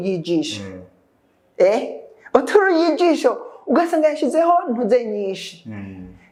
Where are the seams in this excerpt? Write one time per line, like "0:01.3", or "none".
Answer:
none